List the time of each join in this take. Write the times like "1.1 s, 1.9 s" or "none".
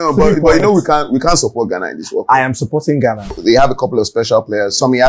3.4 s